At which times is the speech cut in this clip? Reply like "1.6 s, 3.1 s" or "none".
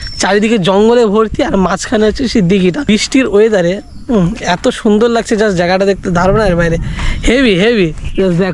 2.9 s